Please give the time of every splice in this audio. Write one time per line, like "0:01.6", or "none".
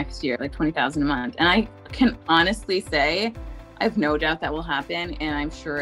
none

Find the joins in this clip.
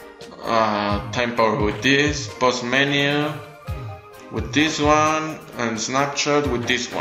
none

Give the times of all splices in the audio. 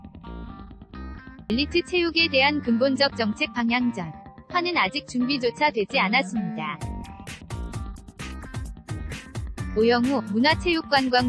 0:00.8
0:06.5
0:09.4

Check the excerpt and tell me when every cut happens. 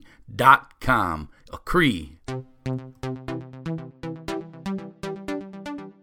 0:02.1

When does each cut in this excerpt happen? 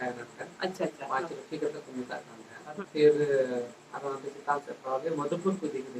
0:02.8

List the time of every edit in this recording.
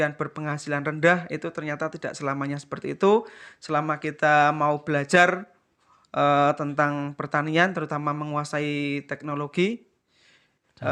none

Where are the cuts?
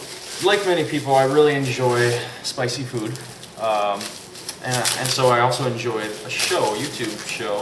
none

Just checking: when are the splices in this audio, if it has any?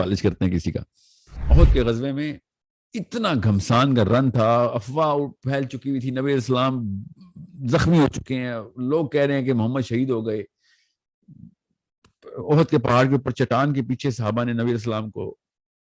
0:01.3

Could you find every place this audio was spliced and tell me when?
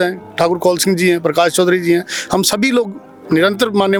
none

